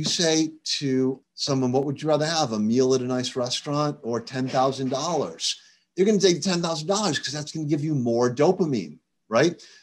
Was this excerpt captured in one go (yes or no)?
no